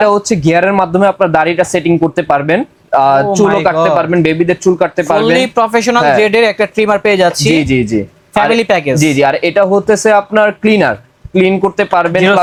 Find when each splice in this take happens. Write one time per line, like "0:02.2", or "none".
none